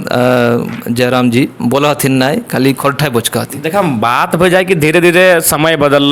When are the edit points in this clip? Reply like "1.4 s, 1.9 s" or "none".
none

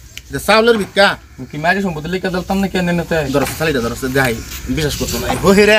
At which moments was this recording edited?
none

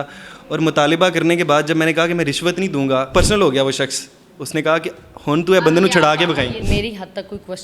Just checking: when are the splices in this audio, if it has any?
3.1 s, 6.6 s

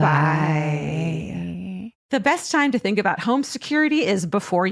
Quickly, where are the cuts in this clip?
1.9 s

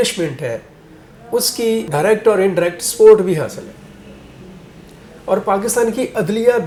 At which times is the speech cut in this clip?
none

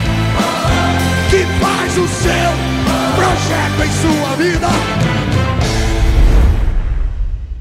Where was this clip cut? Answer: 6.2 s

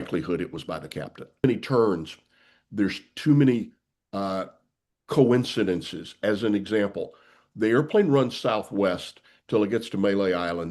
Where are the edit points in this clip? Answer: 1.4 s

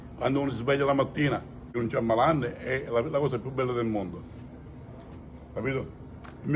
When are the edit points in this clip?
1.6 s

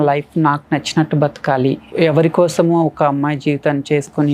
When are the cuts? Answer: 1.9 s

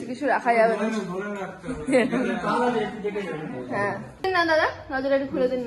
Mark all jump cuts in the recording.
4.2 s

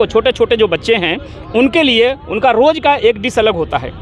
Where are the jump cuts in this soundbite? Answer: none

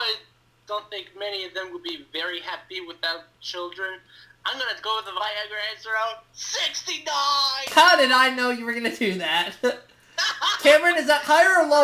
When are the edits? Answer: 4.1 s

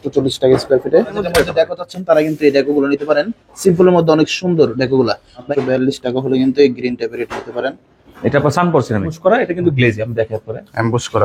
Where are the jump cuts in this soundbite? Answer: 1.2 s, 5.3 s, 9.2 s

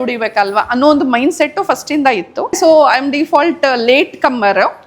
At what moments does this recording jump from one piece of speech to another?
2.5 s

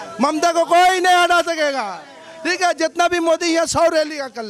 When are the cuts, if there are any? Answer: none

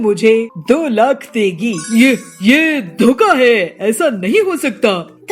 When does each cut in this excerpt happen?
1.8 s

